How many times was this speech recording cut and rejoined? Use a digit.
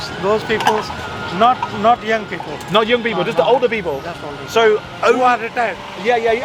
0